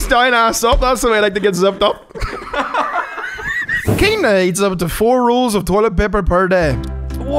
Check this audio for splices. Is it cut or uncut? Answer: cut